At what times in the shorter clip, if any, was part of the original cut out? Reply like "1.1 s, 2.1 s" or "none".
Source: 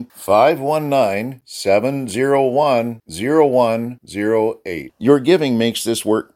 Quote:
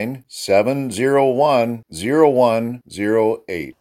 none